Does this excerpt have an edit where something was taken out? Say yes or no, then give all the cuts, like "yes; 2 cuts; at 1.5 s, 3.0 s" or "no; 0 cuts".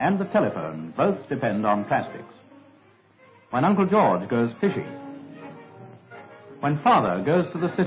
yes; 1 cut; at 2.4 s